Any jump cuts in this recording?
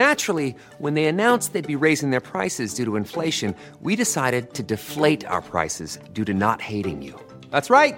no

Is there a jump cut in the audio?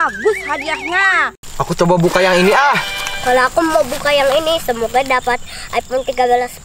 yes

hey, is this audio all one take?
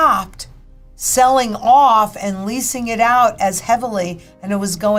yes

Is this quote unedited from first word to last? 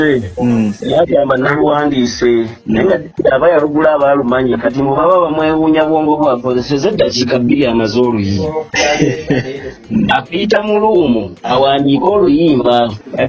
no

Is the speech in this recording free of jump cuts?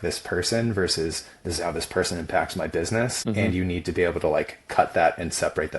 no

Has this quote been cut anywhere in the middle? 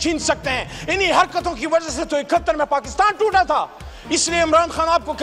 no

